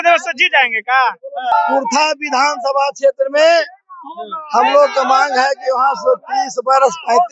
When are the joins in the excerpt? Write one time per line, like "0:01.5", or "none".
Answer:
0:01.5